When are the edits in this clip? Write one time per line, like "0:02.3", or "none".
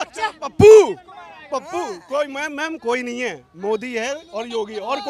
none